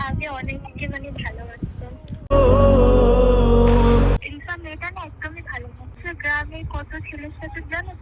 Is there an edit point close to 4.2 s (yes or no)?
yes